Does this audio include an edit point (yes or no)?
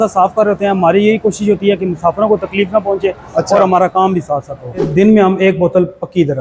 yes